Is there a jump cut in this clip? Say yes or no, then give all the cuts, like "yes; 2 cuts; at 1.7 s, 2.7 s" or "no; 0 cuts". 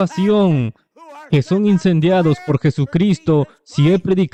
no; 0 cuts